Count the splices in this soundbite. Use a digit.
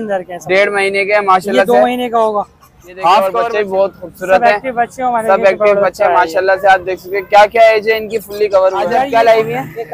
2